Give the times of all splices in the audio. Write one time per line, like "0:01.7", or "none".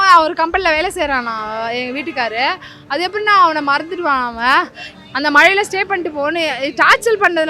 0:04.8